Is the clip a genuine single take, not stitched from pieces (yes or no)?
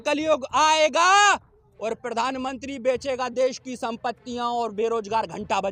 yes